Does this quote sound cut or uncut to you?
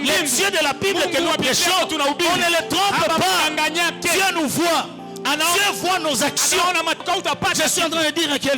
cut